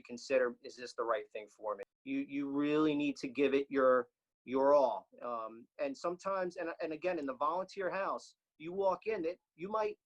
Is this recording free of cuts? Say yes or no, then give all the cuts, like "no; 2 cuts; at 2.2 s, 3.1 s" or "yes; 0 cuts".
no; 1 cut; at 1.9 s